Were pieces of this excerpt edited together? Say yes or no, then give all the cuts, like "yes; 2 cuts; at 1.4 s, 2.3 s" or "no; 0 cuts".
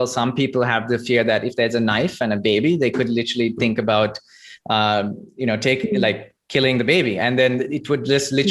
no; 0 cuts